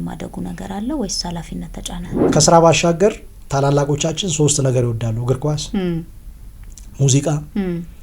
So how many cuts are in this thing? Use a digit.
1